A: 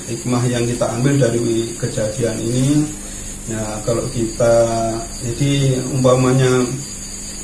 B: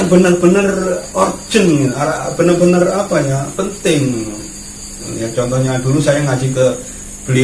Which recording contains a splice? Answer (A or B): B